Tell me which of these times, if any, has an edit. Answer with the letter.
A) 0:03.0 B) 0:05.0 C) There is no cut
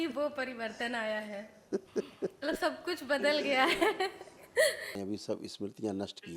B